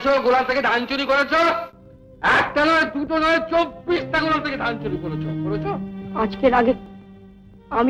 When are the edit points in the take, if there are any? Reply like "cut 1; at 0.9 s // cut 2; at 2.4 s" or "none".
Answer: none